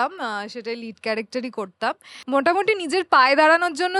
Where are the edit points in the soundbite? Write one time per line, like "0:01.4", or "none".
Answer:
0:02.1